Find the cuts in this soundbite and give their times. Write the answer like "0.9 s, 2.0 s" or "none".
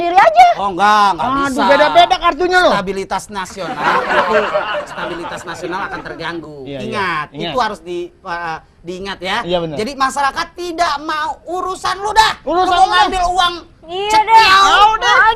none